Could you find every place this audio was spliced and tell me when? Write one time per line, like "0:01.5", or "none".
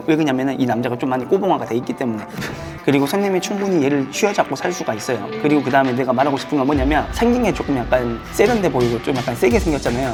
none